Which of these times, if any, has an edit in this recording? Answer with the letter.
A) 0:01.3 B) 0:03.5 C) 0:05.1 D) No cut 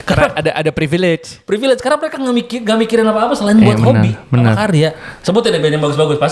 C